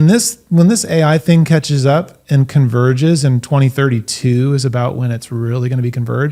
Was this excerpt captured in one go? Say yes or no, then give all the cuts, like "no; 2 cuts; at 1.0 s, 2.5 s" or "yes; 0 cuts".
yes; 0 cuts